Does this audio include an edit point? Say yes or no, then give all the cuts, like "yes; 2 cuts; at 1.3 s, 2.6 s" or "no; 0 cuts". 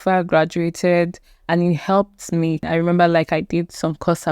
yes; 1 cut; at 2.7 s